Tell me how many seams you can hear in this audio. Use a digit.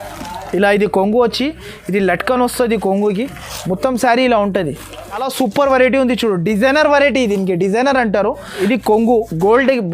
2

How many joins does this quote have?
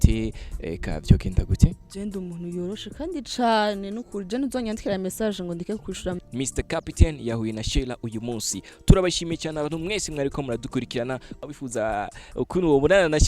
2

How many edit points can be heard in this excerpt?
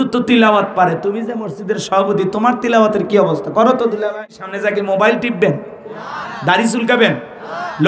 1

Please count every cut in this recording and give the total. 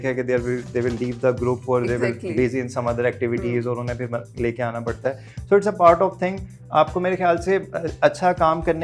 0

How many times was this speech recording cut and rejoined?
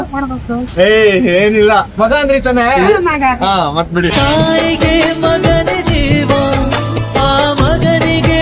1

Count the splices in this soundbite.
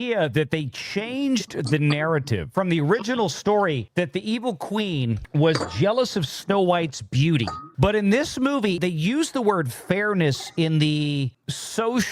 2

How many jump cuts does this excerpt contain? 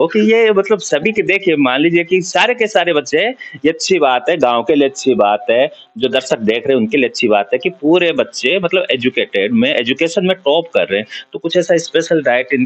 0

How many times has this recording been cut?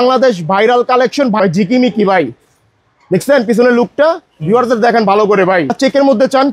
2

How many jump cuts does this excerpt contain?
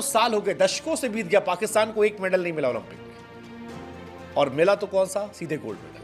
0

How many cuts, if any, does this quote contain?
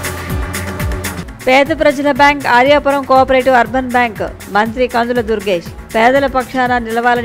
1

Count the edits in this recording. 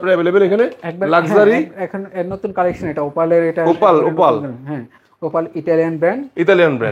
0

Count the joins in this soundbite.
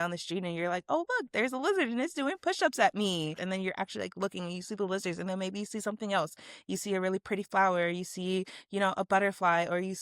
1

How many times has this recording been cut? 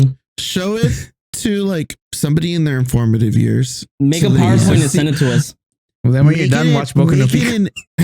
1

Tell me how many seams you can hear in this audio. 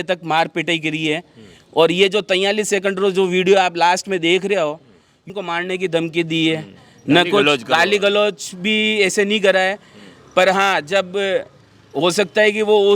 1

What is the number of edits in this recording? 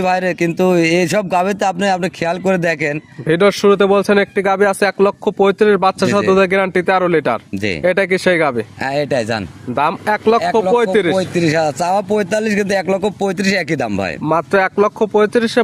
0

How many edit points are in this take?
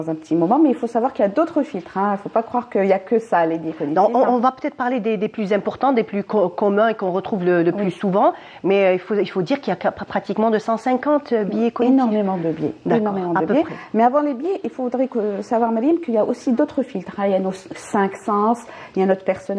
0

